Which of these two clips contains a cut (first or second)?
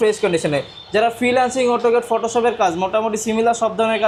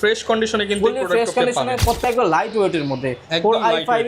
second